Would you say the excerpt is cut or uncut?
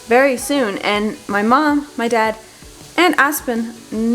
uncut